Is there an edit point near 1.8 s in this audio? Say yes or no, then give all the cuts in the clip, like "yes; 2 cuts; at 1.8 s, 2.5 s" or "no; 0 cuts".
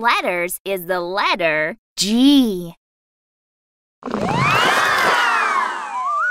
yes; 1 cut; at 1.8 s